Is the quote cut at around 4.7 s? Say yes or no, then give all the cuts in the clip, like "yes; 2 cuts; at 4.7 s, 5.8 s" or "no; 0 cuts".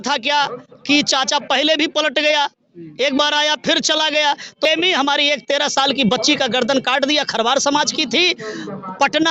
yes; 1 cut; at 4.7 s